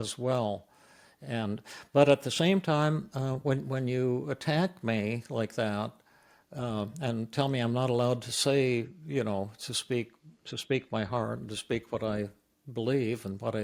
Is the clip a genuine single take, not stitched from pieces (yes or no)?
yes